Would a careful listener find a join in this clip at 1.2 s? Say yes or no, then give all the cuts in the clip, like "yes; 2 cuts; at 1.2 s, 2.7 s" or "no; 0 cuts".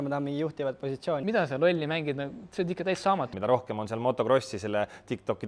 yes; 2 cuts; at 1.2 s, 3.3 s